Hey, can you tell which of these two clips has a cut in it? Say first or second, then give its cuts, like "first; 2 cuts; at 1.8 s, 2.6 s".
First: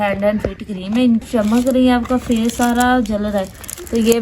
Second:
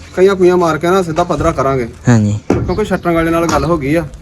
first; 1 cut; at 1.2 s